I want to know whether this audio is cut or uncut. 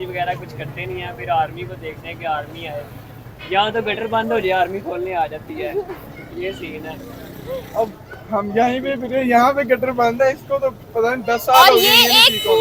uncut